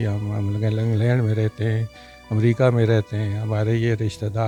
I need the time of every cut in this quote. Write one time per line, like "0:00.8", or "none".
none